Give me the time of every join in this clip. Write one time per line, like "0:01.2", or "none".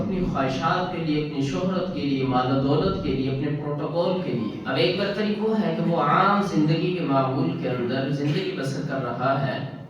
0:04.6